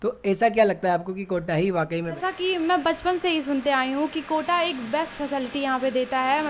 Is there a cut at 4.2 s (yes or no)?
no